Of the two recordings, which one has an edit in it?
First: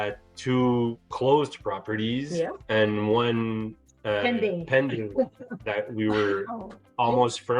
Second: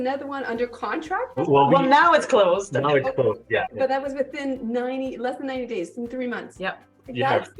second; 3 cuts; at 1.4 s, 3.7 s, 6.5 s

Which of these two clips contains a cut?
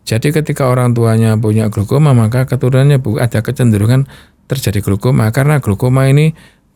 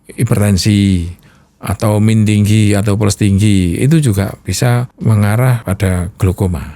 second; 2 cuts; at 4.9 s, 5.6 s

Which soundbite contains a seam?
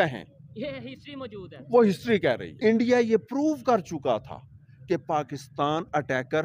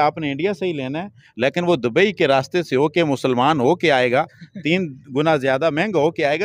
first; 1 cut; at 2.5 s

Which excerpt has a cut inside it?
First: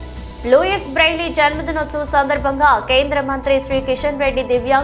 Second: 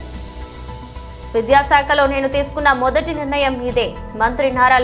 second; 1 cut; at 1.1 s

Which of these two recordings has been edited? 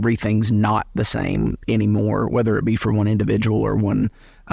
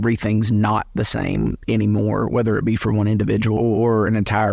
second; 1 cut; at 3.6 s

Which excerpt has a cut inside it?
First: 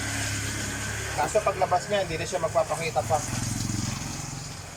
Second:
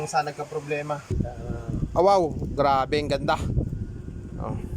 second; 1 cut; at 1.1 s

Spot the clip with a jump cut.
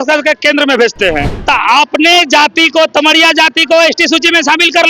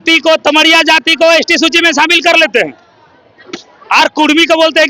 first; 1 cut; at 1.3 s

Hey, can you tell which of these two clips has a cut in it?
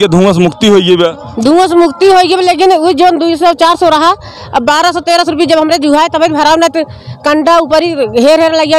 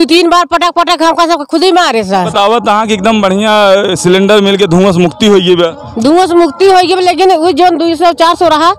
second; 1 cut; at 2.3 s

